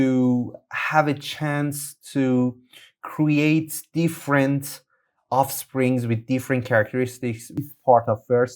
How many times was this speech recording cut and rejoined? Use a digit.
1